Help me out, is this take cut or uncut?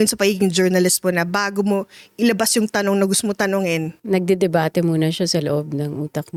uncut